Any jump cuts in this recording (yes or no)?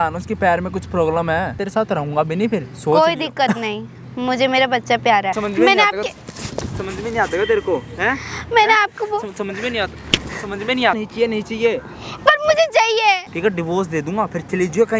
yes